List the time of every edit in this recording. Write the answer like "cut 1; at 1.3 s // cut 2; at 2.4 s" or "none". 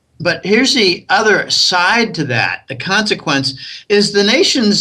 none